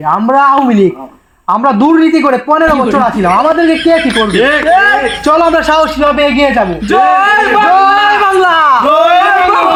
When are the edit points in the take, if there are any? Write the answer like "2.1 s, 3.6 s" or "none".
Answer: none